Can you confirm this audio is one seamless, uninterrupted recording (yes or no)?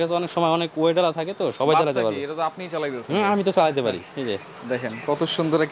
yes